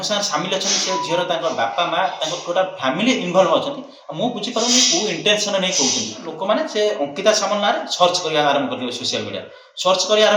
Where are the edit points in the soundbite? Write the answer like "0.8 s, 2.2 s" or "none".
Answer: 6.3 s